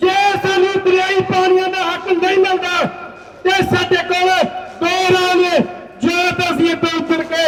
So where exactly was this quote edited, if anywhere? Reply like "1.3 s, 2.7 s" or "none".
none